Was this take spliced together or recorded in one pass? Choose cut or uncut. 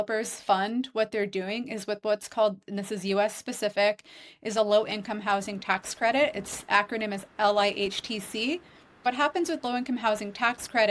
cut